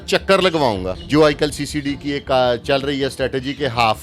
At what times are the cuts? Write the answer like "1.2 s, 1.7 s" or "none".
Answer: 1.0 s